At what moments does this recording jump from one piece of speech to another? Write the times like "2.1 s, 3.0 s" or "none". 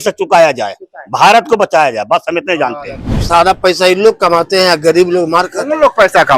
2.9 s